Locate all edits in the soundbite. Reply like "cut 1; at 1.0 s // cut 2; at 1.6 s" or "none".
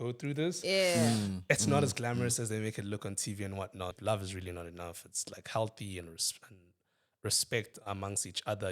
cut 1; at 4.0 s